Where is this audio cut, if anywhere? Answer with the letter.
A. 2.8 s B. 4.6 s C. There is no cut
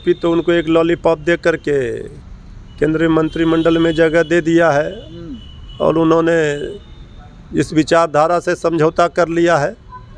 C